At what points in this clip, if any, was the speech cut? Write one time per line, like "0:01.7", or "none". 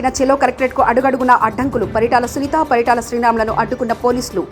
none